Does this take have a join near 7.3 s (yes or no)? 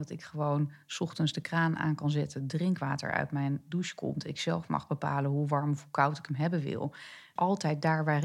yes